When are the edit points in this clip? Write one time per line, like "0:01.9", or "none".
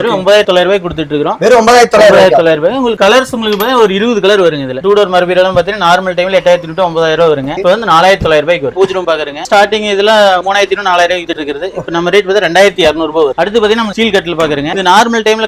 0:04.8
0:08.7
0:13.3